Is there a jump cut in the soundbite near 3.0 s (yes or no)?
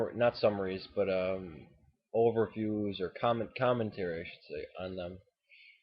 no